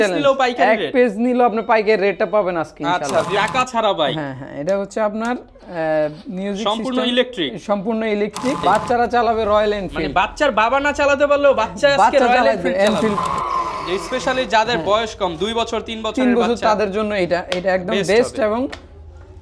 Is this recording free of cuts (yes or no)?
no